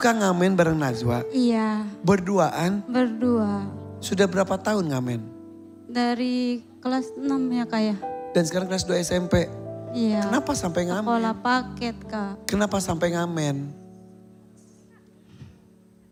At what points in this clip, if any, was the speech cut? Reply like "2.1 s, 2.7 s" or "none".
none